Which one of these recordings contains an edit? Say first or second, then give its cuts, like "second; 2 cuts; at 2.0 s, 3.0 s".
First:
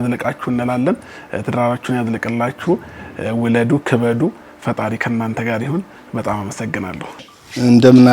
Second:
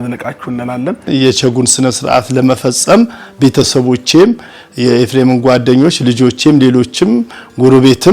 second; 1 cut; at 1.1 s